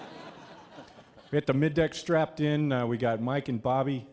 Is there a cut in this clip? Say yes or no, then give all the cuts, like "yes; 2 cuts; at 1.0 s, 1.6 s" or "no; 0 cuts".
yes; 1 cut; at 1.8 s